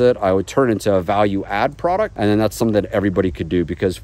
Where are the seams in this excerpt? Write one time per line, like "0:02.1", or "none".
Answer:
0:02.1